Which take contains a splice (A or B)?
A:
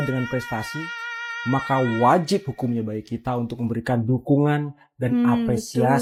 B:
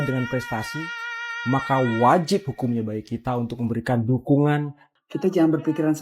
B